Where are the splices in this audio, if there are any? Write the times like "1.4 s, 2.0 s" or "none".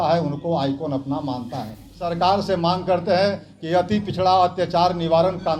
2.1 s